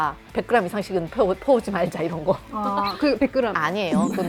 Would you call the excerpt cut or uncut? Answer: uncut